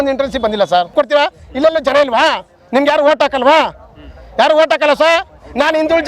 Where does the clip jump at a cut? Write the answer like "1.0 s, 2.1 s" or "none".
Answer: 0.9 s